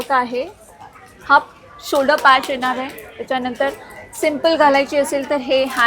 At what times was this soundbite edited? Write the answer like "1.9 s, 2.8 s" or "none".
none